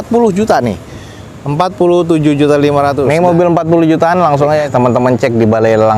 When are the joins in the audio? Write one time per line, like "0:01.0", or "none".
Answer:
0:03.1